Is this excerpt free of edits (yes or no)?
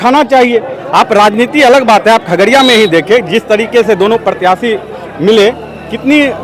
yes